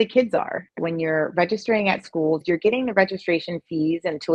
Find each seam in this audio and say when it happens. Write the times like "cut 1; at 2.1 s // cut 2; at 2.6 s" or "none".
cut 1; at 0.7 s // cut 2; at 2.4 s

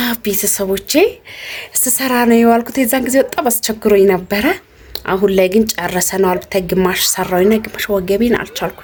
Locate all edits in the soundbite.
none

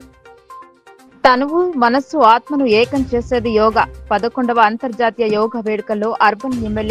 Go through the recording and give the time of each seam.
cut 1; at 1.0 s

